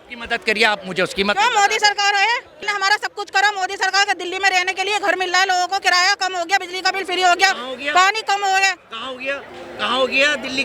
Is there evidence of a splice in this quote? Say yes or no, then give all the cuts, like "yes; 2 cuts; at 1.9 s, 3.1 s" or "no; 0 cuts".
yes; 1 cut; at 2.6 s